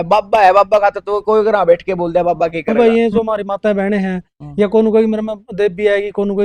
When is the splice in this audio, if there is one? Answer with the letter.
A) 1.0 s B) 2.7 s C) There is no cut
B